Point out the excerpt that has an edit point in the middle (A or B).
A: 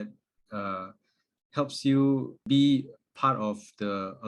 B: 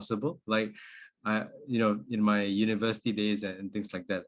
A